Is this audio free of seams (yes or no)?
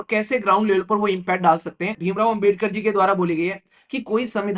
no